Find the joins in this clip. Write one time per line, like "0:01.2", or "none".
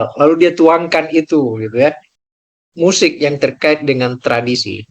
0:02.1